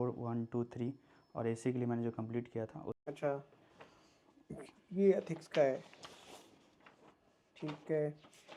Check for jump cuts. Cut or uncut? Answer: cut